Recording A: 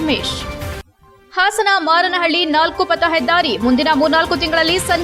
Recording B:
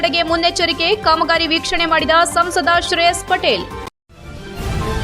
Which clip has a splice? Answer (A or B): B